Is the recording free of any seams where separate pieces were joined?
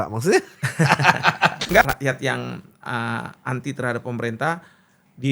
no; 1 cut; at 1.8 s

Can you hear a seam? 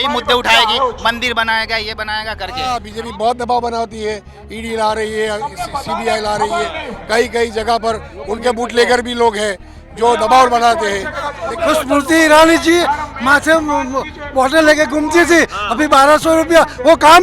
yes; 2 cuts; at 2.6 s, 11.4 s

